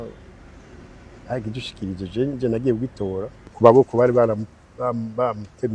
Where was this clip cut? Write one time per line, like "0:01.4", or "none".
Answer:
0:03.5